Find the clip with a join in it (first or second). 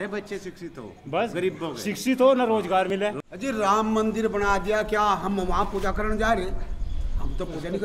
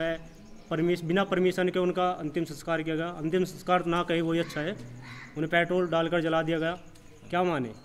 first